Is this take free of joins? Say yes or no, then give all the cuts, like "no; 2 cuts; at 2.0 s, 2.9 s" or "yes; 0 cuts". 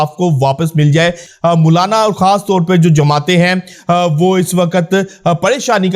no; 1 cut; at 1.3 s